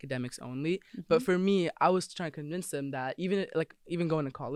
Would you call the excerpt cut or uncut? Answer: uncut